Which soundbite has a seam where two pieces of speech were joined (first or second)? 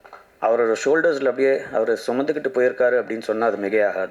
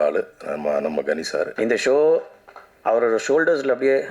second